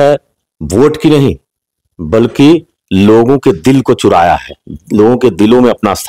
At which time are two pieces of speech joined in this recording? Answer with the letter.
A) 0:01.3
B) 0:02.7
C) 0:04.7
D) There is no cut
D